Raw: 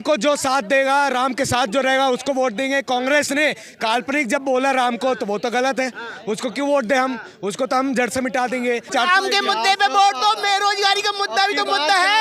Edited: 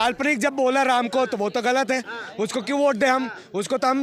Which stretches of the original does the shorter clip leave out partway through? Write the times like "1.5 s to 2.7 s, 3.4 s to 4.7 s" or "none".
none